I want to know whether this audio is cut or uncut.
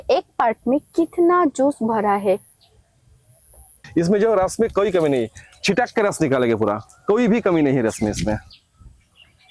uncut